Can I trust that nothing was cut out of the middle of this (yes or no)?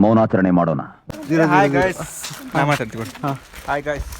no